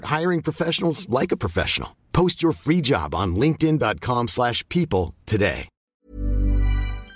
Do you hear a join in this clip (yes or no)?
yes